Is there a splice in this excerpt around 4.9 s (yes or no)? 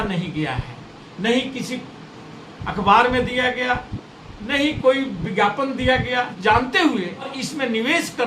no